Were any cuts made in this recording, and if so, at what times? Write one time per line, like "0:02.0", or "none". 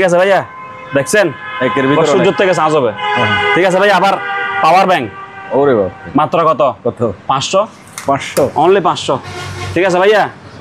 none